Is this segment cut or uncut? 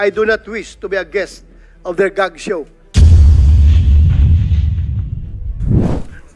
cut